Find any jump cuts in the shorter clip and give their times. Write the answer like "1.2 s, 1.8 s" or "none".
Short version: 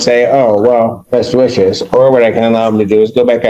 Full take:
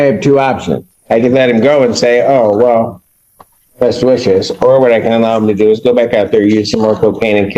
1.0 s